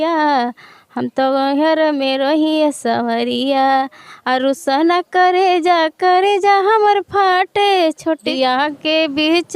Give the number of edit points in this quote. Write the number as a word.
one